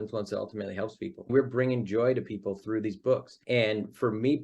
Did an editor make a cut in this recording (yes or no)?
yes